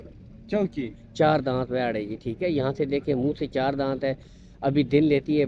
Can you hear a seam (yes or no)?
no